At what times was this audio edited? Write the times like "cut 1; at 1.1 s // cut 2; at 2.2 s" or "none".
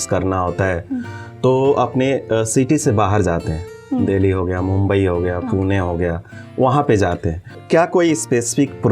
cut 1; at 7.5 s